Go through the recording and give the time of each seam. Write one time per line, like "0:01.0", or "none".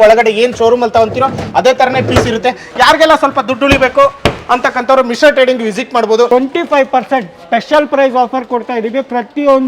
0:06.3